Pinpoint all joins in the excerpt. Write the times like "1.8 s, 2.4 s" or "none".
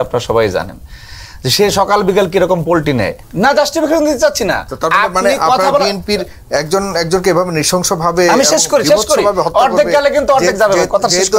3.2 s